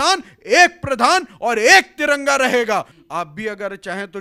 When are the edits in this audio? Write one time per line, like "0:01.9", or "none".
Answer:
0:03.0

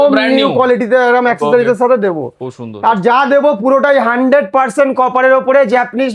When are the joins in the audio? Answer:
none

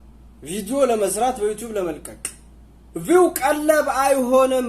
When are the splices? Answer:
none

